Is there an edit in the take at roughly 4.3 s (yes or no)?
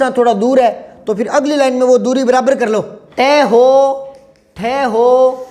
no